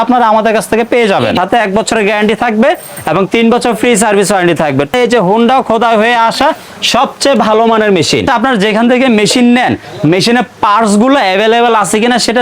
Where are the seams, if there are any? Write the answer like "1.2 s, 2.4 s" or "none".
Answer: 1.3 s, 4.9 s, 8.3 s